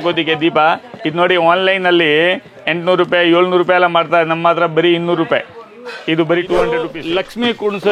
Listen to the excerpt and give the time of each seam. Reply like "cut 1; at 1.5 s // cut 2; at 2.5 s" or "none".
cut 1; at 6.9 s